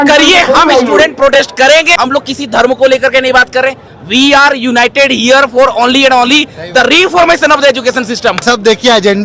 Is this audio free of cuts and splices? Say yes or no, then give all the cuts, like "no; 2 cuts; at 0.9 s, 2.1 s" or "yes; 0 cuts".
no; 2 cuts; at 1.9 s, 8.4 s